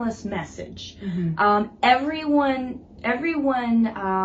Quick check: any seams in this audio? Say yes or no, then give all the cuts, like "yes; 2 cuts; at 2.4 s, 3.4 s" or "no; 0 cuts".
no; 0 cuts